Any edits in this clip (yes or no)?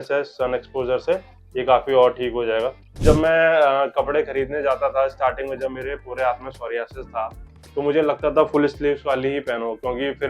yes